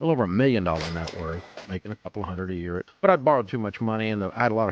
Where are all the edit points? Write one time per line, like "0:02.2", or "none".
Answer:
0:01.5
0:02.9